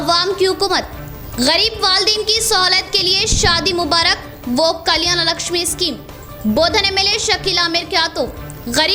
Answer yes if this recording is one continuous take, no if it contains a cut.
yes